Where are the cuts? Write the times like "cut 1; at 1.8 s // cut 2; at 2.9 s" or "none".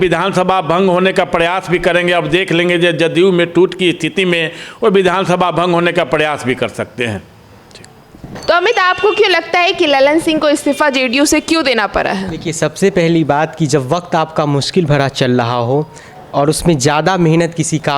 none